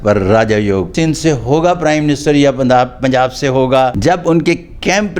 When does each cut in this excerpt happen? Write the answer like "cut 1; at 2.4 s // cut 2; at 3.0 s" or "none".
cut 1; at 0.9 s // cut 2; at 4.0 s

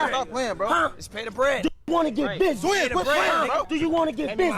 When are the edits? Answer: cut 1; at 3.7 s

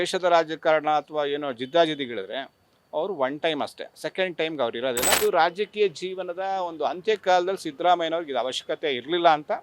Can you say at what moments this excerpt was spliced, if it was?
cut 1; at 5.1 s

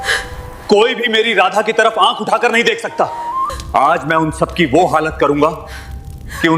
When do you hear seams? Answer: cut 1; at 3.6 s

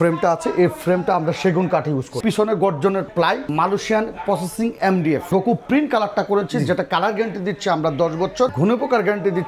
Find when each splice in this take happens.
cut 1; at 2.2 s // cut 2; at 3.5 s // cut 3; at 5.2 s // cut 4; at 8.5 s

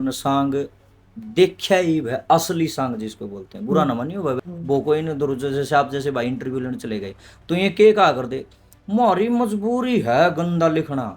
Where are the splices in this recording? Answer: cut 1; at 4.4 s

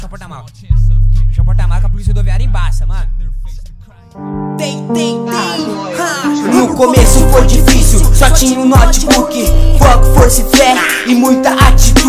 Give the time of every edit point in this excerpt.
cut 1; at 4.3 s

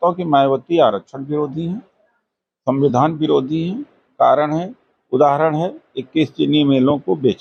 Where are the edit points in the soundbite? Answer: none

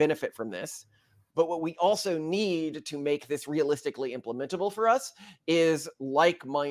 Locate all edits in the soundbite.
cut 1; at 1.2 s

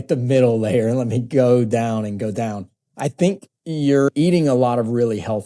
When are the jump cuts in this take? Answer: cut 1; at 4.3 s

